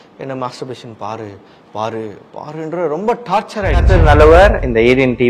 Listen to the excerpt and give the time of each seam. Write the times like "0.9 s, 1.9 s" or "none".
3.7 s